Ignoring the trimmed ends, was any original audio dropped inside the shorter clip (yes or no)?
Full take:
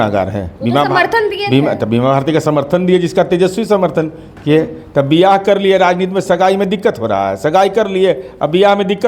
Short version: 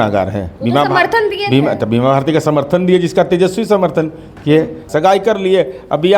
yes